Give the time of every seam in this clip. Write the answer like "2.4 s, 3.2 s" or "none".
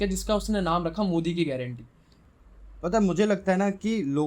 2.4 s